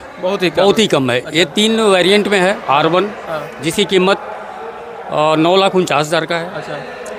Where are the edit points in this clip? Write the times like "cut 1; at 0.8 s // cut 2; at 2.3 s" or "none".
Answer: none